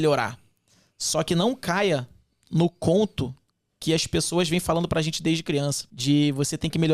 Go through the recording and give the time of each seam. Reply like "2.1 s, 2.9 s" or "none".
5.9 s